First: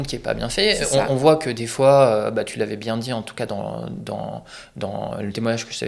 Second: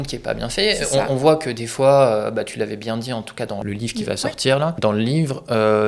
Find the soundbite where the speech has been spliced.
second; 2 cuts; at 3.6 s, 4.8 s

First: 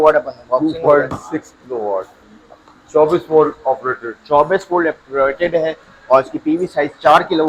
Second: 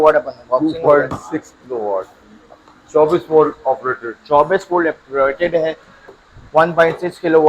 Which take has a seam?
second; 1 cut; at 5.9 s

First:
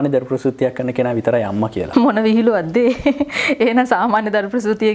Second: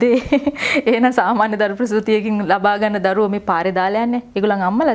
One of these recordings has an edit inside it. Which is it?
first; 1 cut; at 1.8 s

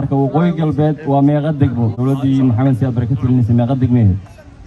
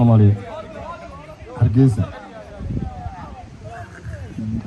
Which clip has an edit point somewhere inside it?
first; 1 cut; at 1.9 s

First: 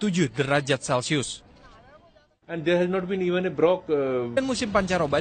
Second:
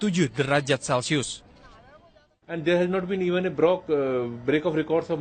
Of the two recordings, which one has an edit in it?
second; 1 cut; at 4.3 s

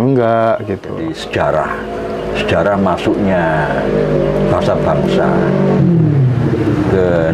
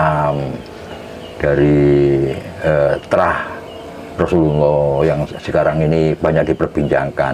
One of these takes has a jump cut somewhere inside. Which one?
first; 1 cut; at 1.2 s

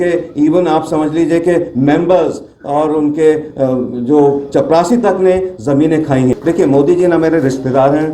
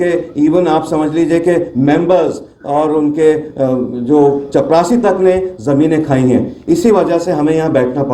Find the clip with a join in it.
first; 1 cut; at 6.3 s

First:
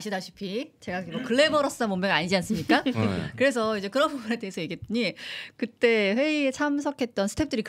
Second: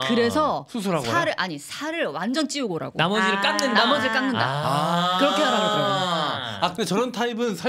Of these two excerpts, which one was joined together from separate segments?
second; 1 cut; at 6.7 s

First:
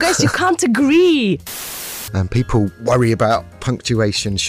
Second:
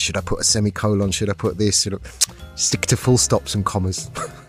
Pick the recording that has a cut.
first; 2 cuts; at 1.6 s, 2.8 s

